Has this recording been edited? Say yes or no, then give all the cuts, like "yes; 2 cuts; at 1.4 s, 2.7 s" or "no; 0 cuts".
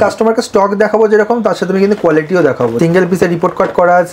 yes; 1 cut; at 2.8 s